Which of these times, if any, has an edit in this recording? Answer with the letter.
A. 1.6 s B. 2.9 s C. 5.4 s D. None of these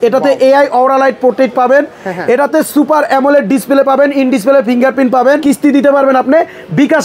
C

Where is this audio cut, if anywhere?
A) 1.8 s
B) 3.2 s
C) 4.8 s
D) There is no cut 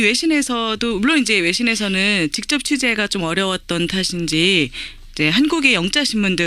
A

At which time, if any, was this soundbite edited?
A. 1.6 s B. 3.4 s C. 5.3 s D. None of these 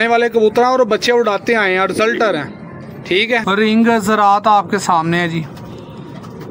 B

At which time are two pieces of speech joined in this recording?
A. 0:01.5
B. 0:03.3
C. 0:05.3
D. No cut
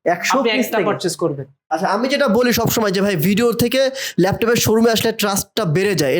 A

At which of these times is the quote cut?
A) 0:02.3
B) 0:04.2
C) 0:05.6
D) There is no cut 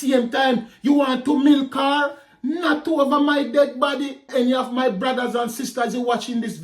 B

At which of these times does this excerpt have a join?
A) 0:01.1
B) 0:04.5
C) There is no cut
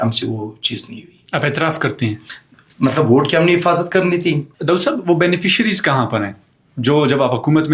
B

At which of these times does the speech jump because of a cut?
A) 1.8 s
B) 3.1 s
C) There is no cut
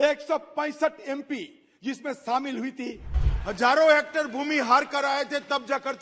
B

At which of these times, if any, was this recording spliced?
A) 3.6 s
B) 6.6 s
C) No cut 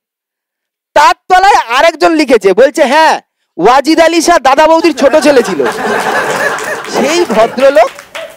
B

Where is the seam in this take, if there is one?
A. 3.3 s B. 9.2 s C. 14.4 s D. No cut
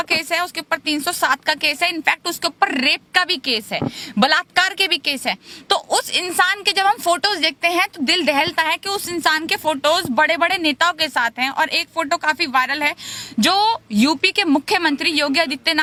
D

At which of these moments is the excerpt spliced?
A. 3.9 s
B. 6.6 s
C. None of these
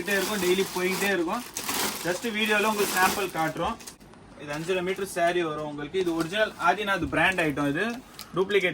A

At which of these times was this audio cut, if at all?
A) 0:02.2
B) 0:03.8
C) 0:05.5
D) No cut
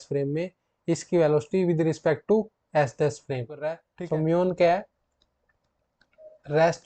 B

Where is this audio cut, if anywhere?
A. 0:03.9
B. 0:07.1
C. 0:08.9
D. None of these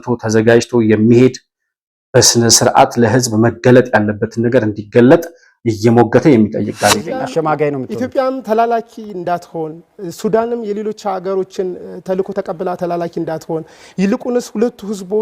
B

